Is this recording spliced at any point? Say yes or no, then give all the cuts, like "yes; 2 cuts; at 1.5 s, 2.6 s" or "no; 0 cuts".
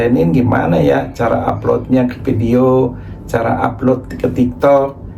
no; 0 cuts